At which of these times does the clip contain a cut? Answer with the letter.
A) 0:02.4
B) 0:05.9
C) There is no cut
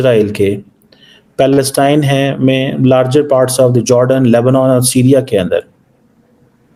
C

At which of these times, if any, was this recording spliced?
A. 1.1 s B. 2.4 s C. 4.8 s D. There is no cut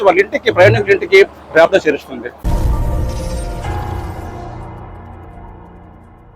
B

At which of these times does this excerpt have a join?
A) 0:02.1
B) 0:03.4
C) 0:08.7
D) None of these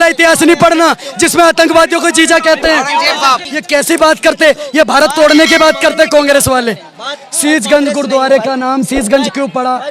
B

